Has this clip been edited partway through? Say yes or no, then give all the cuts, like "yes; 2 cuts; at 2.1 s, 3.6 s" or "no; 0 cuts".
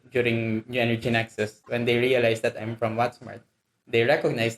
yes; 1 cut; at 1.6 s